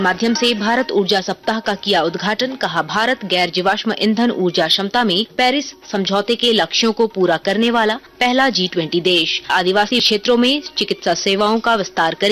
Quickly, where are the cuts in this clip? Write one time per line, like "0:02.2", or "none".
none